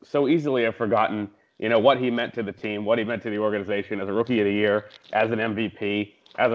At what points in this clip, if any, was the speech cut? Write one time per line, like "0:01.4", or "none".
none